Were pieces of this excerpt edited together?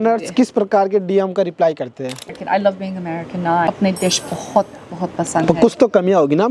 yes; 2 cuts; at 2.2 s, 3.7 s

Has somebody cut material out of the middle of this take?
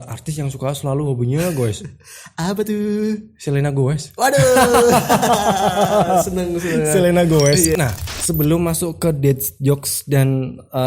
yes; 1 cut; at 7.7 s

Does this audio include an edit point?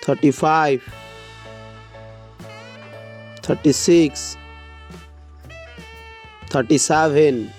no; 0 cuts

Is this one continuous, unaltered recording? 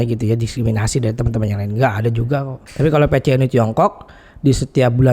no; 1 cut; at 2.6 s

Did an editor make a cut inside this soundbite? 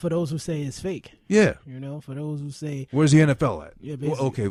no; 0 cuts

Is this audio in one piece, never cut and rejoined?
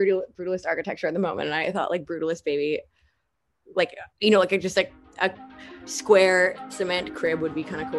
yes; 0 cuts

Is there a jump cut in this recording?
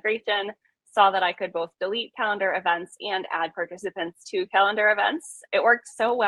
yes; 1 cut; at 5.3 s

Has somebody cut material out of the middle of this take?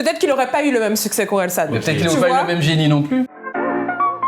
yes; 1 cut; at 3.4 s

